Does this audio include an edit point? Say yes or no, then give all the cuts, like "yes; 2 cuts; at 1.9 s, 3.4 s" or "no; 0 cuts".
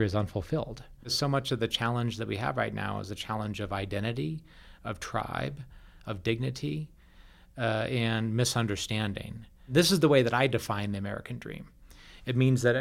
yes; 2 cuts; at 1.2 s, 9.7 s